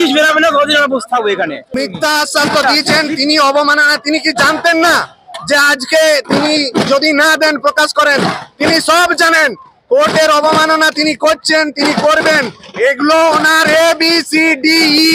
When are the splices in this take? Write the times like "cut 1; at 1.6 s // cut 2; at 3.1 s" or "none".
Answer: cut 1; at 1.6 s